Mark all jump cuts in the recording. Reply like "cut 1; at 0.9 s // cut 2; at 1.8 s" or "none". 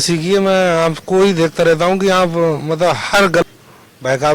cut 1; at 3.4 s